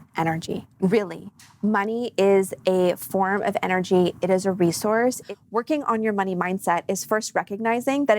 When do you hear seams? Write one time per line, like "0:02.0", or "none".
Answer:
0:05.2